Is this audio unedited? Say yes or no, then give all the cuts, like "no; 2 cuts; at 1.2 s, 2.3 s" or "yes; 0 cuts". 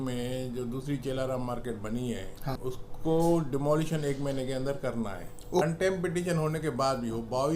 no; 2 cuts; at 2.6 s, 5.6 s